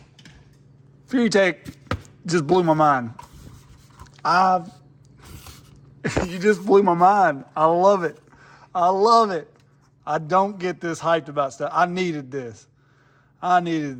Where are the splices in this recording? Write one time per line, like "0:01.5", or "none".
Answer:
none